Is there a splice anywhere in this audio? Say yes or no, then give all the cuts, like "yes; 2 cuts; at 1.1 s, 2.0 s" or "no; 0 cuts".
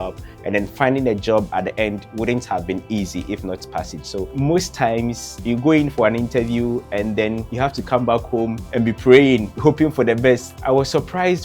yes; 6 cuts; at 4.3 s, 5.3 s, 7.5 s, 8.6 s, 9.5 s, 10.5 s